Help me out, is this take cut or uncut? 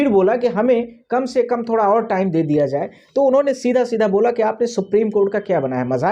uncut